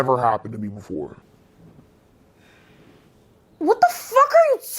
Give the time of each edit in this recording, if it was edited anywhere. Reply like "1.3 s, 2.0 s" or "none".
3.4 s